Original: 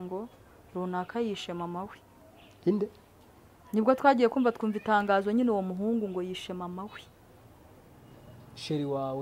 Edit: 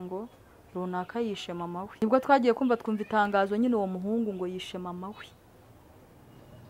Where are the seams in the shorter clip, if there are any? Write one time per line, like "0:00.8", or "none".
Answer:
0:02.0